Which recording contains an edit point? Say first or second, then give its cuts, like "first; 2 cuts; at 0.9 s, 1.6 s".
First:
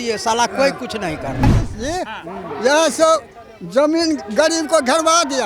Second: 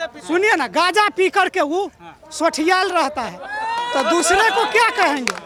first; 1 cut; at 1.4 s